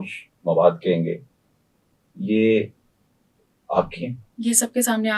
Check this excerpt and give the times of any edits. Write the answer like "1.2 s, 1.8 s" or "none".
4.2 s